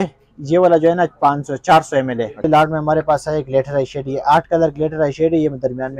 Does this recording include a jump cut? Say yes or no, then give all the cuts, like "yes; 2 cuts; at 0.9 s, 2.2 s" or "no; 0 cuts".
yes; 1 cut; at 2.5 s